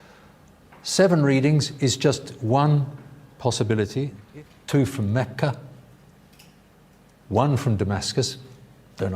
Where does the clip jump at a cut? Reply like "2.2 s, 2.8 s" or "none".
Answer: 4.2 s